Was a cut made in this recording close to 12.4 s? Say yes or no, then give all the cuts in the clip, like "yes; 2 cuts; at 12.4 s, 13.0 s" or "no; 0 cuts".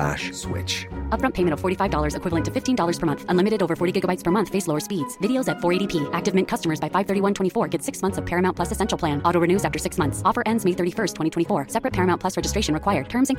no; 0 cuts